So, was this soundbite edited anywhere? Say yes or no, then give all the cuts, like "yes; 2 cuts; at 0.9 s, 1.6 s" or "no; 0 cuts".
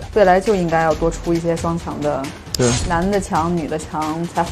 no; 0 cuts